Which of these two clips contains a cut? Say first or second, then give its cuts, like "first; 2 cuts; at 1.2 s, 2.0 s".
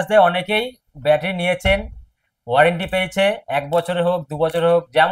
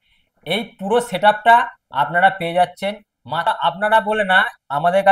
second; 1 cut; at 3.5 s